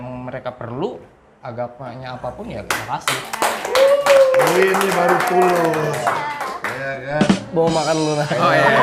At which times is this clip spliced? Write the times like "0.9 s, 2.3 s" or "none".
none